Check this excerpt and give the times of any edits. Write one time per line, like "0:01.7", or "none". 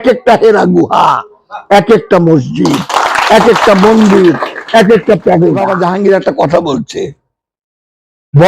0:05.7

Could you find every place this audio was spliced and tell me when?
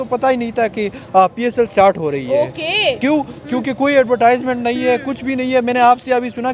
none

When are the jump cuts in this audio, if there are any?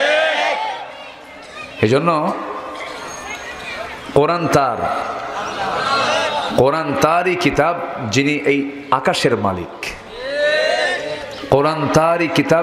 none

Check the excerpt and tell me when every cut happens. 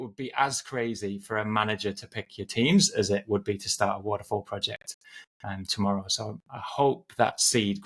none

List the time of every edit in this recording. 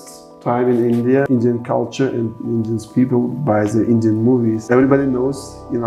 0:01.3
0:04.6

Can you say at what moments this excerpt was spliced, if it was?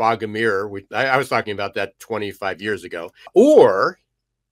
0:03.3

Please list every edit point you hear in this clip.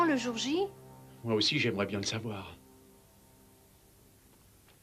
none

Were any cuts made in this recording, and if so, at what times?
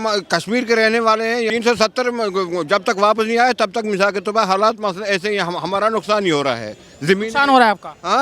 0:01.5

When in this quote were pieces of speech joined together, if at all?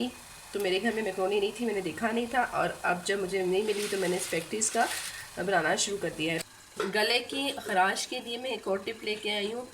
0:06.4

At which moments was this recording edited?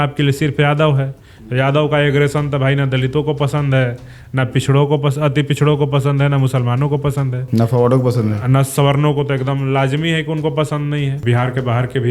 0:11.2

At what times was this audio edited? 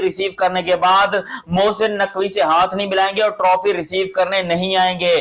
none

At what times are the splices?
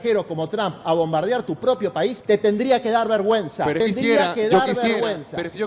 0:02.2
0:03.8

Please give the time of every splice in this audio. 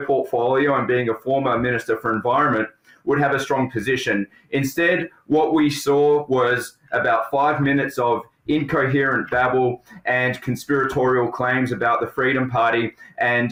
none

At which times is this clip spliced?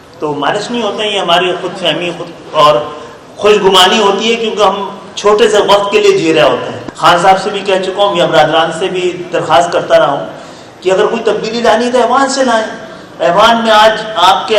0:06.7

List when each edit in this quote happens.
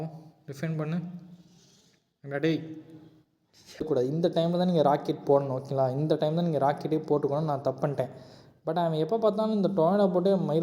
0:03.8

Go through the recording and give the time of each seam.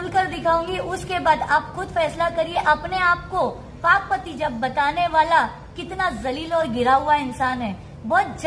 0:02.5

